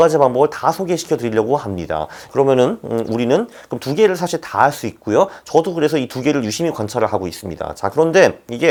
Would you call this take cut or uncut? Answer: uncut